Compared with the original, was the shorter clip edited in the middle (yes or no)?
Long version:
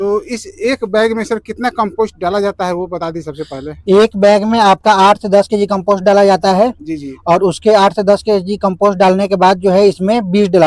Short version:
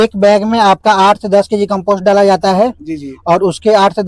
no